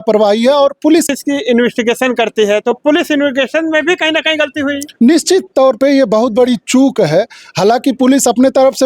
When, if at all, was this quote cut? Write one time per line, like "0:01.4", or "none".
0:01.1